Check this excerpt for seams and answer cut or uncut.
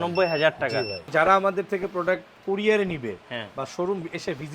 cut